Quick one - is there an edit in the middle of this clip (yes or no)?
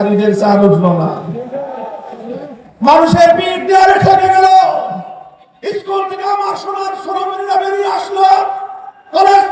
no